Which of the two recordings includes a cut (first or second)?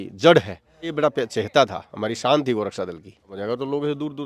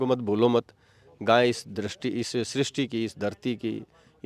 first